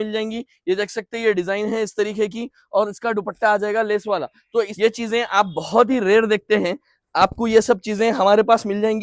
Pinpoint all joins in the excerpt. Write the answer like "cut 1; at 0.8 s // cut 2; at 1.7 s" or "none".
cut 1; at 4.7 s